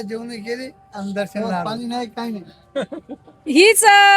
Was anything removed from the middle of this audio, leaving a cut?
yes; 1 cut; at 1.6 s

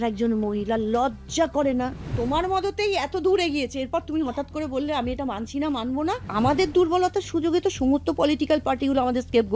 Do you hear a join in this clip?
yes; 2 cuts; at 2.0 s, 6.3 s

